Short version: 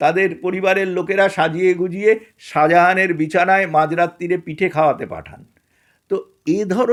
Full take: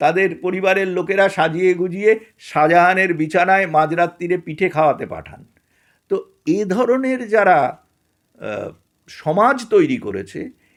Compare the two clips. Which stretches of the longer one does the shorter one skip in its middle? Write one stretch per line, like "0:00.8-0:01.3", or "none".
none